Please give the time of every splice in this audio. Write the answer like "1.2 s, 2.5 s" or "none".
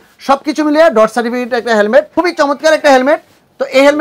2.1 s